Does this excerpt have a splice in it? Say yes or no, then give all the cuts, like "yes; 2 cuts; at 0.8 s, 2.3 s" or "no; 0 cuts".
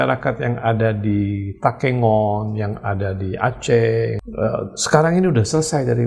yes; 1 cut; at 4.2 s